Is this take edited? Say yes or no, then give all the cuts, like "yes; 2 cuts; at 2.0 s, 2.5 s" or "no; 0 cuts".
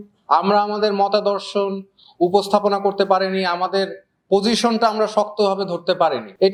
no; 0 cuts